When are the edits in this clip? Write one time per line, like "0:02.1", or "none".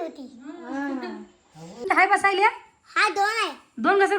0:01.9